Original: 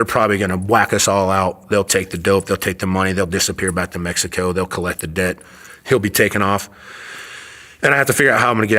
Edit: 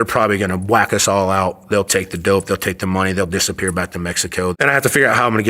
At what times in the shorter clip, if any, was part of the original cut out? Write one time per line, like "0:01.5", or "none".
0:04.5